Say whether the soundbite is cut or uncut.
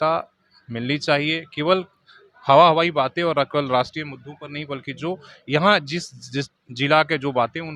uncut